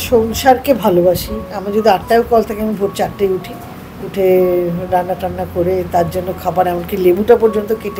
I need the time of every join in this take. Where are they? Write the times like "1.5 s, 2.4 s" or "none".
1.6 s